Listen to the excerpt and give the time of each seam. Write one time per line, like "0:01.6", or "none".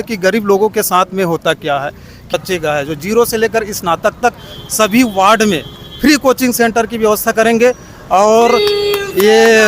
0:02.3

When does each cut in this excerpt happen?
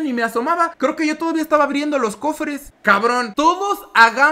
0:03.3

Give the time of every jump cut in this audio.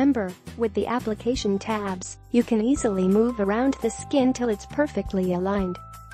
none

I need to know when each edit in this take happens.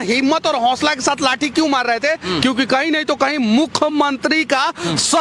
none

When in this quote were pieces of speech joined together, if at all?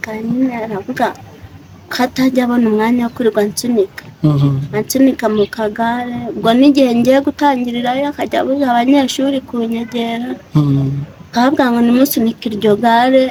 none

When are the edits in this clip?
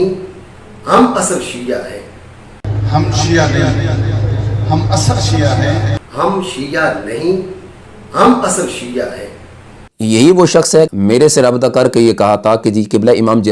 0:02.6
0:06.0
0:09.8
0:10.9

